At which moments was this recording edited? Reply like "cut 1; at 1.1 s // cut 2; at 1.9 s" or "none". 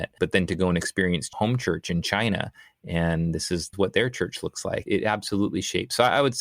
cut 1; at 1.3 s // cut 2; at 3.7 s // cut 3; at 4.9 s